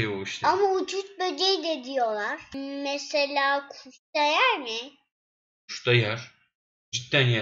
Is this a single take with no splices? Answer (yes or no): no